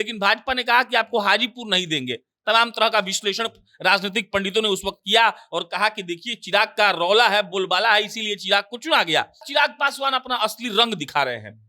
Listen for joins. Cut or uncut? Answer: cut